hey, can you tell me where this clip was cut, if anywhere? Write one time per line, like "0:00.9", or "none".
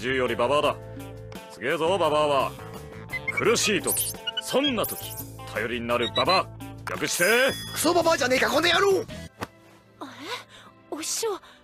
0:10.1